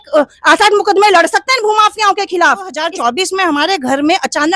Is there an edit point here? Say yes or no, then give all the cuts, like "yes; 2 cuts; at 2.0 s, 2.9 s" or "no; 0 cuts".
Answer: yes; 1 cut; at 2.8 s